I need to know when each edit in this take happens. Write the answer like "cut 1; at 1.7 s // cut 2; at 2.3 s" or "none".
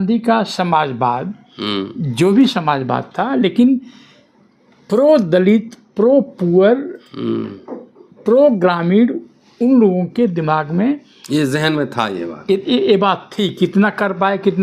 none